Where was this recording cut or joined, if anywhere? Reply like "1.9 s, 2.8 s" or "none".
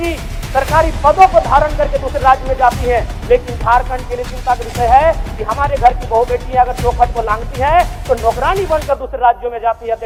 none